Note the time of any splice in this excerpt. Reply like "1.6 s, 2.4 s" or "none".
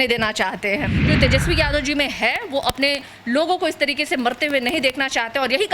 1.0 s

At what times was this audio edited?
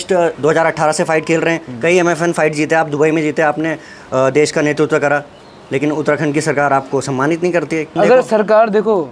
7.9 s

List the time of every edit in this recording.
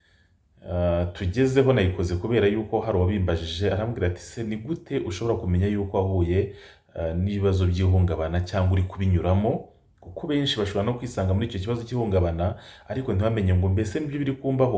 none

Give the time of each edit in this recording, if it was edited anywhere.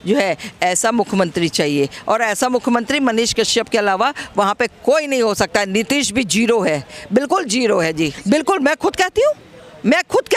8.2 s

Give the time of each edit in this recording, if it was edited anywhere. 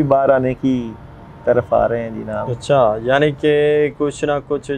none

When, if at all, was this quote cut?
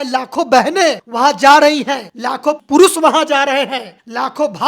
2.6 s

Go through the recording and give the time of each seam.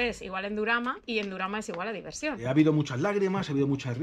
1.0 s, 2.4 s

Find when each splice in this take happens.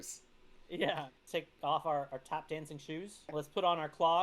1.2 s, 3.3 s

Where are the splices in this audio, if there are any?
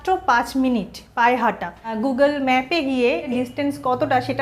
1.9 s, 3.3 s

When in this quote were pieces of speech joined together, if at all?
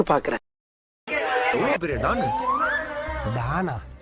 1.5 s

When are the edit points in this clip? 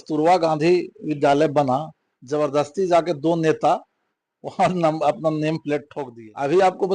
6.0 s

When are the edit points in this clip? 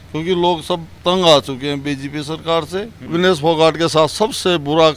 0.9 s, 3.0 s

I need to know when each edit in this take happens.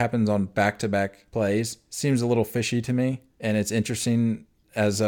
1.2 s, 1.8 s, 3.3 s

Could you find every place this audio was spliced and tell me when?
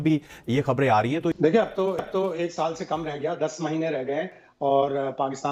none

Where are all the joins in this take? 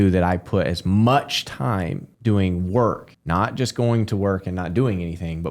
2.0 s, 3.1 s

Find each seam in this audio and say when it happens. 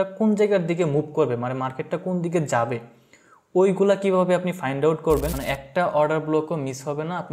5.4 s

